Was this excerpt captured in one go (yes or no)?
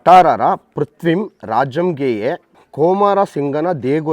no